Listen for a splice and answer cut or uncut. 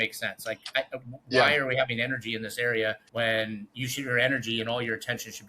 cut